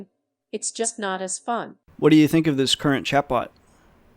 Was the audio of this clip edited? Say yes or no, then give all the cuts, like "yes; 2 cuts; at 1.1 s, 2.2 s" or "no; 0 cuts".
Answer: yes; 1 cut; at 1.8 s